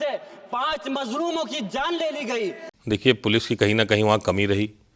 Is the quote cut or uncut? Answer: cut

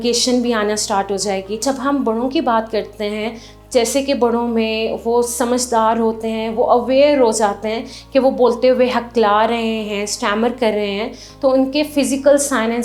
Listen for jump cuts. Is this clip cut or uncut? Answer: cut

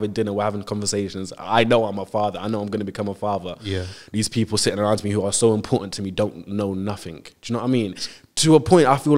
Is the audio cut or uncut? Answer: uncut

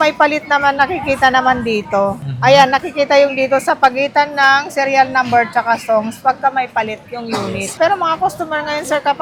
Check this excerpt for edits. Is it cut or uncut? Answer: uncut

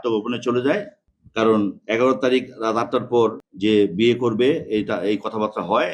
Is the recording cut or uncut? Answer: uncut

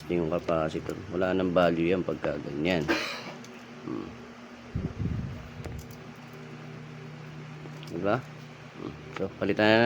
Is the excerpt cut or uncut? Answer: uncut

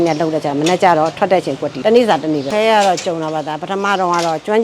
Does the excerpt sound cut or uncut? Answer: cut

